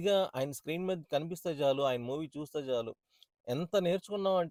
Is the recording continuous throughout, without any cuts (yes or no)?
yes